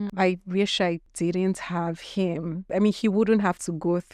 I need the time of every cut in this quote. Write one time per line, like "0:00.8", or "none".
0:01.1
0:02.7